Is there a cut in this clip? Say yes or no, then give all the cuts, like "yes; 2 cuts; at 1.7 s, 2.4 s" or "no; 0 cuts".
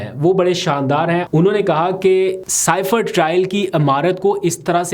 yes; 2 cuts; at 1.3 s, 2.5 s